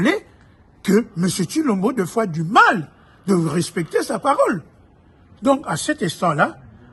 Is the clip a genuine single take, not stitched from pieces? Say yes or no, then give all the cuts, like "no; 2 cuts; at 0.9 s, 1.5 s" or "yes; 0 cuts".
yes; 0 cuts